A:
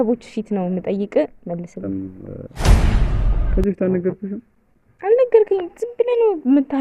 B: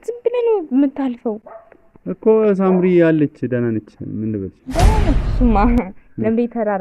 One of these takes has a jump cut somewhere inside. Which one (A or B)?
A